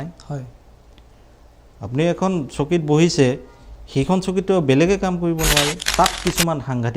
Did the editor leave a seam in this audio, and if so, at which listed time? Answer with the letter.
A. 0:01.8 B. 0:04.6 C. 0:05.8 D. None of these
C